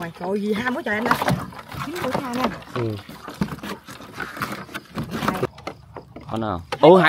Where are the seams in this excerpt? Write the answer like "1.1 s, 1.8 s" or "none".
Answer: 5.5 s